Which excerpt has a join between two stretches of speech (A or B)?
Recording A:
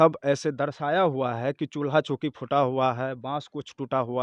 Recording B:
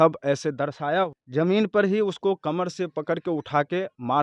B